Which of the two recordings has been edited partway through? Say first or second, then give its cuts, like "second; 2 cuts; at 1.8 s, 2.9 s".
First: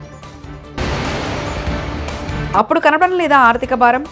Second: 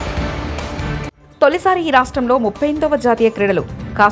second; 1 cut; at 1.1 s